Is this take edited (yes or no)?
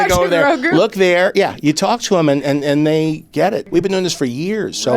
yes